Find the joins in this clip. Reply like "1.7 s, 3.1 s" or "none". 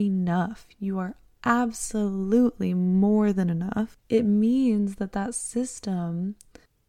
4.0 s